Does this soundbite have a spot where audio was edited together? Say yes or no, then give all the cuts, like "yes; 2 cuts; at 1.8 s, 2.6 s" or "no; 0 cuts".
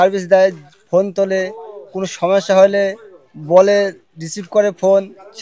no; 0 cuts